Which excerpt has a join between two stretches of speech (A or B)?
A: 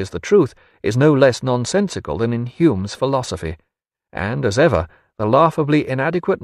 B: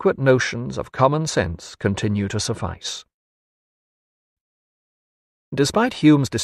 A